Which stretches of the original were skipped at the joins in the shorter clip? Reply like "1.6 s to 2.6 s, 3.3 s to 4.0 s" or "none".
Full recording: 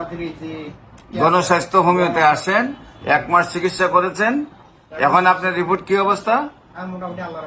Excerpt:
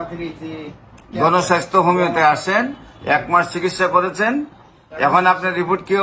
none